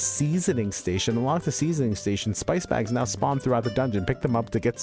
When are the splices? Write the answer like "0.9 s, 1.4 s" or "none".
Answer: none